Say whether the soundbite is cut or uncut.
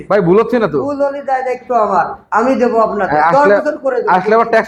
uncut